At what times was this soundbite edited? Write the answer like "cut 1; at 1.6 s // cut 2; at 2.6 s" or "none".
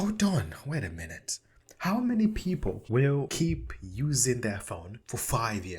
cut 1; at 3.2 s // cut 2; at 4.9 s